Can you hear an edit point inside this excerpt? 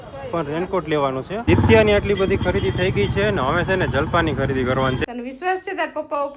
yes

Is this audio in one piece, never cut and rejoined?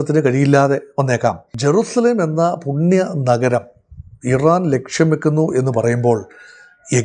no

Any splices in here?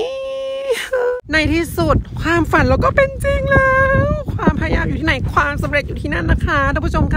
yes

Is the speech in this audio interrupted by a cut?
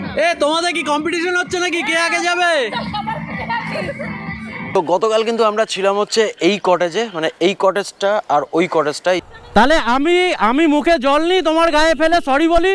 yes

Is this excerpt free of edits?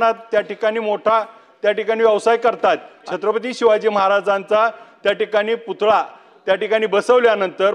no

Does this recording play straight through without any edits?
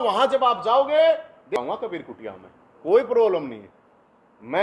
no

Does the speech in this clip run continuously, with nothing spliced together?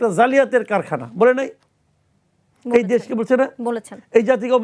yes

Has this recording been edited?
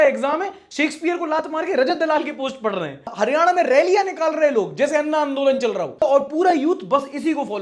no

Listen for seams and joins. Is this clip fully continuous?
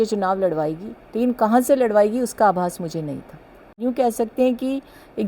no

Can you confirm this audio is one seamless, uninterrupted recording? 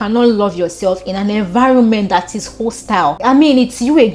no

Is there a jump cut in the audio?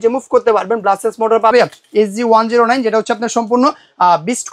yes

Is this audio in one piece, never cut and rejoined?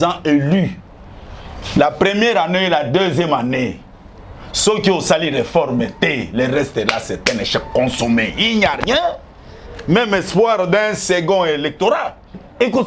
yes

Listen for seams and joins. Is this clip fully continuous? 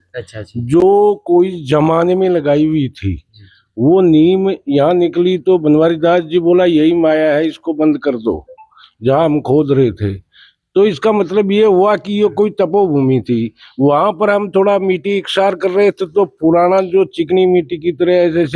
yes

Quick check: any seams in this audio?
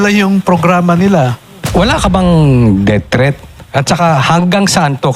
yes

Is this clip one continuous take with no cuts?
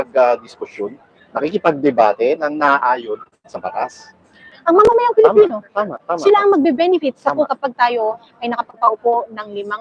no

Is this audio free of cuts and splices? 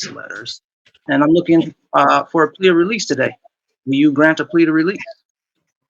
no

